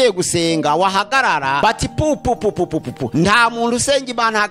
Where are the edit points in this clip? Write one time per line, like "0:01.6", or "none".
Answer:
0:01.6
0:03.0